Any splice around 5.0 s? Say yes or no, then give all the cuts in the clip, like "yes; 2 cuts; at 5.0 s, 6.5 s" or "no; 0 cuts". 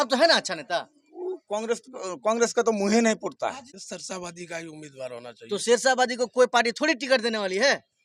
no; 1 cut; at 3.7 s